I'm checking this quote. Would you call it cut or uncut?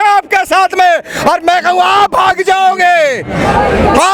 uncut